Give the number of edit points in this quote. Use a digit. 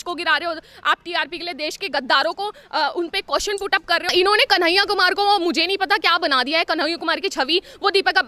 1